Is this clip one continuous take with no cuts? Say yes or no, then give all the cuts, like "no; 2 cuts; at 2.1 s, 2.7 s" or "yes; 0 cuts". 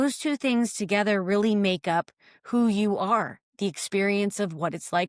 yes; 0 cuts